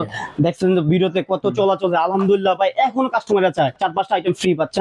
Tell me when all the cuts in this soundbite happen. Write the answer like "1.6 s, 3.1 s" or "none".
3.8 s

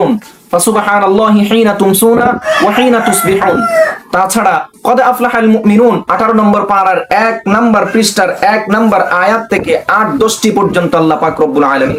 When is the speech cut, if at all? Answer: none

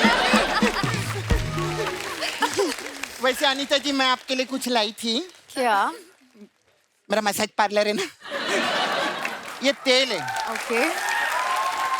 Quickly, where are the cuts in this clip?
2.1 s

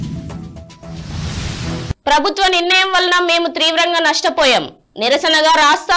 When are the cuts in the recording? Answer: 2.0 s

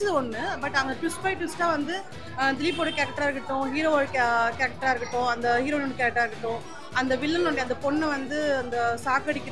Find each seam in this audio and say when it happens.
none

